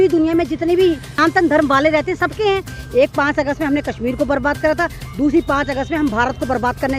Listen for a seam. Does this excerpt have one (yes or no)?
yes